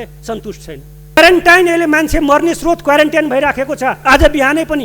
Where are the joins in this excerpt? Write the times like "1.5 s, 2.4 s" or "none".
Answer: 1.2 s